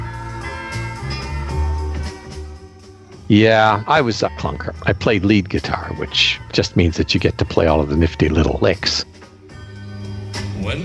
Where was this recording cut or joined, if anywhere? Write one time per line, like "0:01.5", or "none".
none